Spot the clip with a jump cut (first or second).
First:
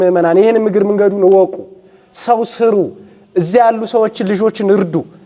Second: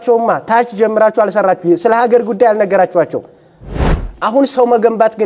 second